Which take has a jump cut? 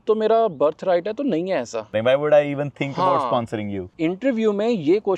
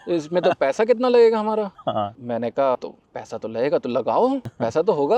first; 2 cuts; at 2.0 s, 3.9 s

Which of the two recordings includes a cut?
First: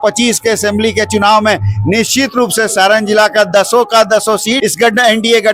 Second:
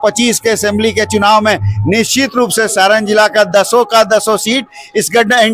first; 1 cut; at 4.6 s

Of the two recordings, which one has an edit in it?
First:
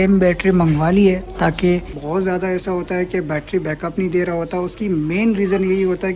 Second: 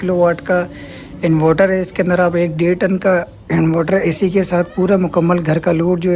first; 1 cut; at 2.0 s

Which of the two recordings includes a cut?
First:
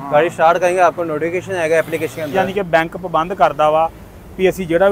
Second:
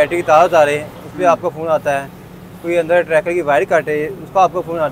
first; 1 cut; at 2.3 s

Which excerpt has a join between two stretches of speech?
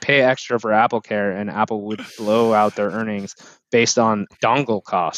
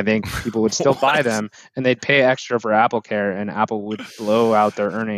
first; 1 cut; at 4.3 s

